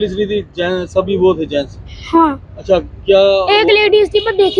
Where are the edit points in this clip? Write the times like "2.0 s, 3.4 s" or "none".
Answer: none